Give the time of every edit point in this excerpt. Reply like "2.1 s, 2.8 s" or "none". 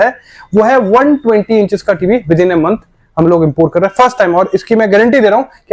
none